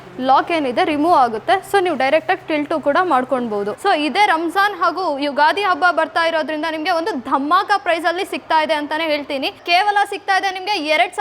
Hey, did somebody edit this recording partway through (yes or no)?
yes